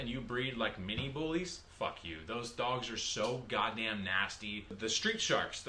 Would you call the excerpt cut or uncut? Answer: cut